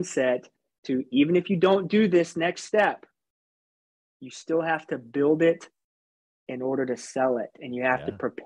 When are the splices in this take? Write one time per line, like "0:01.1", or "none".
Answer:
none